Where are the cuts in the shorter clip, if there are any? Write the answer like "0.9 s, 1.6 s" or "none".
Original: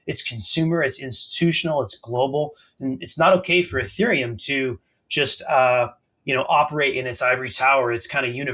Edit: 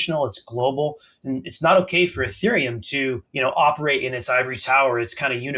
3.3 s